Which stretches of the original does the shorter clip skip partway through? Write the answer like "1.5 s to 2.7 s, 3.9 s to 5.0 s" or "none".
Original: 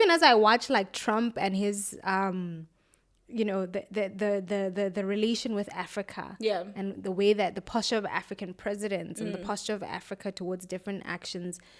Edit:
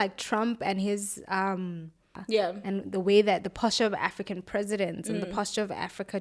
2.9 s to 6.2 s